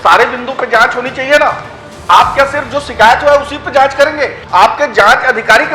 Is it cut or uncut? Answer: cut